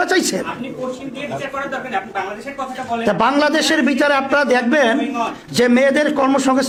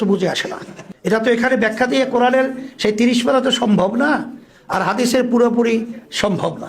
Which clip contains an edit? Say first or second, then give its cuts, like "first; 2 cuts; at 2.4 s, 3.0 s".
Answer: second; 1 cut; at 1.2 s